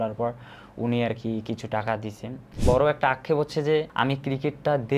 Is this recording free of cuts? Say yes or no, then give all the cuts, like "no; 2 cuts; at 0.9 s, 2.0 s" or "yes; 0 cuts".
no; 1 cut; at 2.5 s